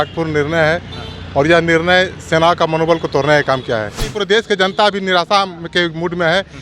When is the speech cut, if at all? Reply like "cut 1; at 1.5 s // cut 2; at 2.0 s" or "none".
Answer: cut 1; at 4.1 s